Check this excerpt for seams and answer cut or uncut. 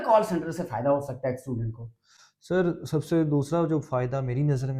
uncut